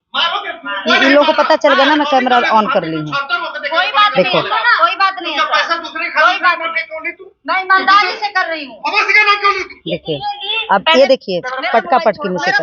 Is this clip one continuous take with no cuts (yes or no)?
yes